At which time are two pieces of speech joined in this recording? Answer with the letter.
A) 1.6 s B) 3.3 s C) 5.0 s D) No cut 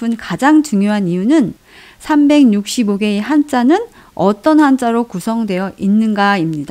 A